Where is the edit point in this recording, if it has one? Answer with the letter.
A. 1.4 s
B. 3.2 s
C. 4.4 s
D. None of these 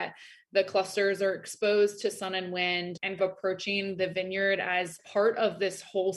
B